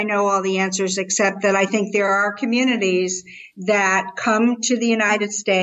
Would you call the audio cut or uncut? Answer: uncut